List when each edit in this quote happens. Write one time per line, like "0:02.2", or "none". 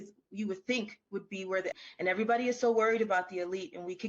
0:01.7